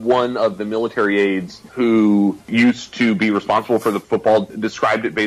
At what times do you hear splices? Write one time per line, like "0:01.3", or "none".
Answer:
0:01.6
0:02.4
0:04.0